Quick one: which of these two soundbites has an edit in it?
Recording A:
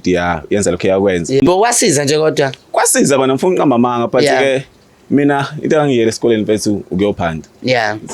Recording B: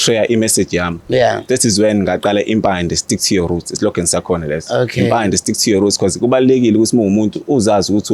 A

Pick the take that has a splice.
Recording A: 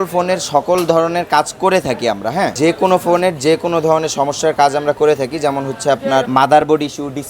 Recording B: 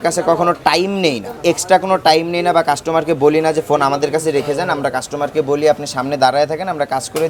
A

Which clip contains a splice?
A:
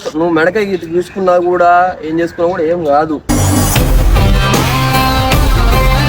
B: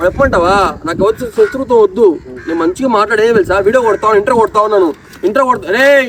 A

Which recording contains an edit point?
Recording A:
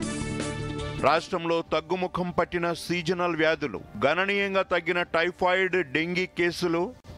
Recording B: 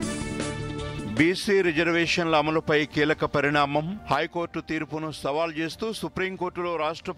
B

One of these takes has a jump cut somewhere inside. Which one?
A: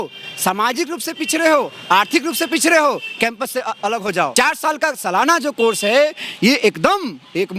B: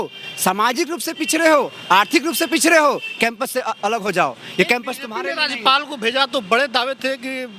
A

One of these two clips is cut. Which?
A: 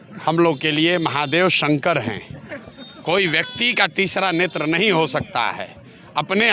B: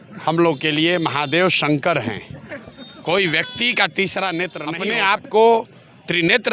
B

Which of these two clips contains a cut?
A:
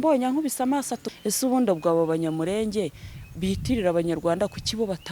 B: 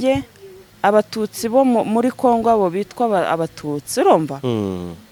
A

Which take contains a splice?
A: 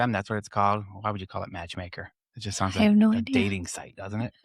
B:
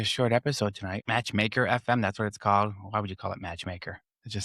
B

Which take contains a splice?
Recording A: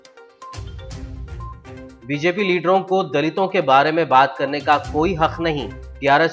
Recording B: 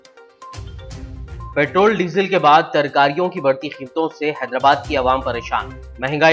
A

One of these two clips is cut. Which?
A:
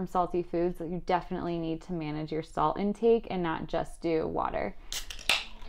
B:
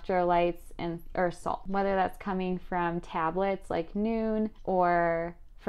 B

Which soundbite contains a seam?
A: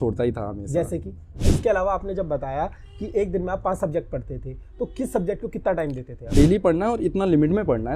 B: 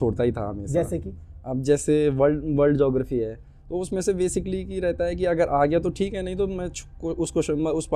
A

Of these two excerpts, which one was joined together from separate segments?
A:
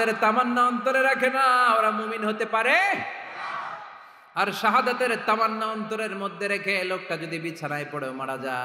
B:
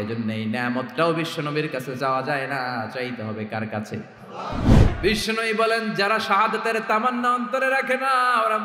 B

